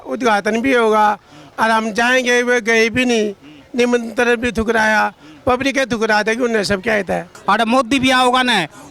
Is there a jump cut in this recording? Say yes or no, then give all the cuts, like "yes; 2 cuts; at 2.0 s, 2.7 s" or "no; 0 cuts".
yes; 1 cut; at 7.3 s